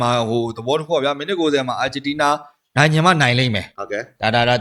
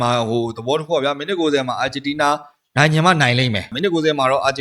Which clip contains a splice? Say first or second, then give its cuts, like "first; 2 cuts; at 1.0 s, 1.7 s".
second; 1 cut; at 3.7 s